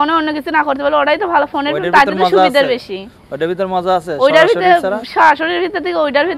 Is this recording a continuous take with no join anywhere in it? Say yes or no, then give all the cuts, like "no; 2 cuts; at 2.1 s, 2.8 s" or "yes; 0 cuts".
yes; 0 cuts